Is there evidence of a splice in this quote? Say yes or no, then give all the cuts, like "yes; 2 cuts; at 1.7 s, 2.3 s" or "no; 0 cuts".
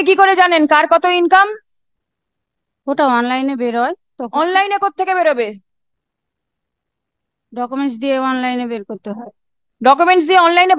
no; 0 cuts